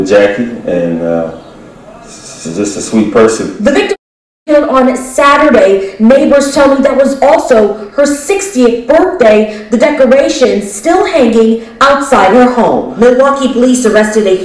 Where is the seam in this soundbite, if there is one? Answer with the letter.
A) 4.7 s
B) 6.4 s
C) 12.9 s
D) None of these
D